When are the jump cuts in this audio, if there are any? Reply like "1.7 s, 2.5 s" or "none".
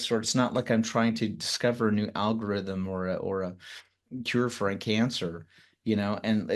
none